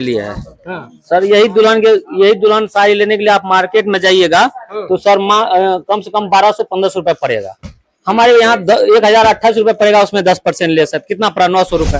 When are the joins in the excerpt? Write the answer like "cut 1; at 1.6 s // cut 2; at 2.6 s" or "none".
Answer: none